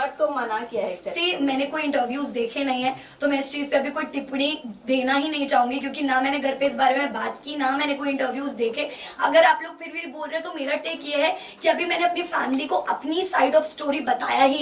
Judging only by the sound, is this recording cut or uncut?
uncut